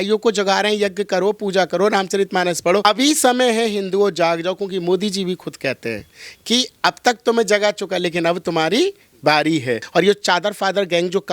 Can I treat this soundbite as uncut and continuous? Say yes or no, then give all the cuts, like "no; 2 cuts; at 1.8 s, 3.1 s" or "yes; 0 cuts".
no; 2 cuts; at 2.8 s, 9.8 s